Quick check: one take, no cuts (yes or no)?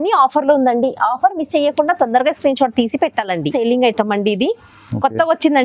no